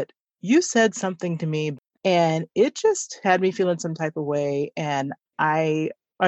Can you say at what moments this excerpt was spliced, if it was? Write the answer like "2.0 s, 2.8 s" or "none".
1.7 s